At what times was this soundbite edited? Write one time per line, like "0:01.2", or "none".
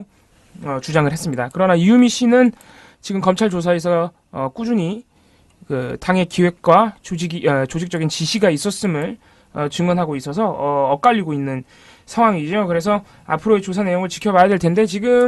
0:06.7